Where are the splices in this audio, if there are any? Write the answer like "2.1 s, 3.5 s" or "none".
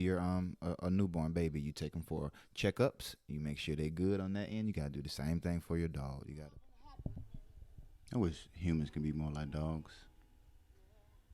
6.3 s